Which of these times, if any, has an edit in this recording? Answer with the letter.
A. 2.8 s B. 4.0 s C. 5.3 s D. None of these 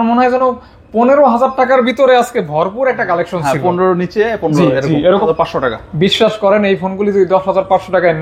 C